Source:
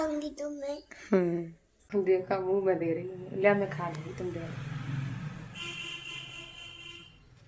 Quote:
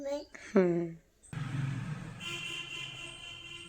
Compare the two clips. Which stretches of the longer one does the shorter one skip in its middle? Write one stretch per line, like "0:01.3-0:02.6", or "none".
0:01.7-0:04.5